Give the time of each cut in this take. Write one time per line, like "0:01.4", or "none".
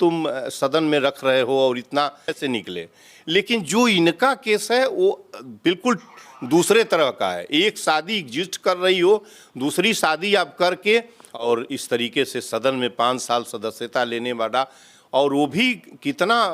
0:02.4
0:11.2